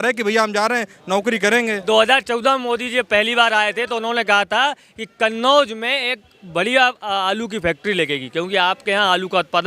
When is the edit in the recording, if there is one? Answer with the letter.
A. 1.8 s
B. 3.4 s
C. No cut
A